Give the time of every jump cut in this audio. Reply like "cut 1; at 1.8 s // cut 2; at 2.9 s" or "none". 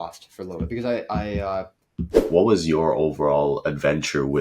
cut 1; at 2.2 s